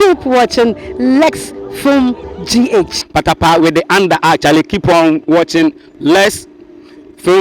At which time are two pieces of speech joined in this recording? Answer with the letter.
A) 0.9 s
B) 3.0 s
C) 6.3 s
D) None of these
B